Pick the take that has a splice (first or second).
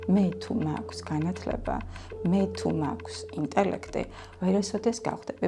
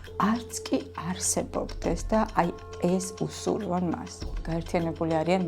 second